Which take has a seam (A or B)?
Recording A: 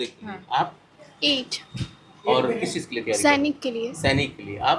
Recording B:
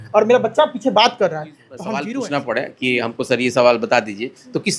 B